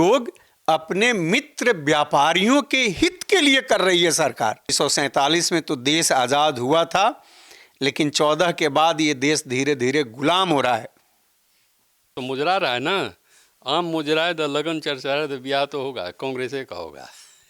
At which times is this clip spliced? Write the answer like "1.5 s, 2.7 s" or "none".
4.7 s, 12.0 s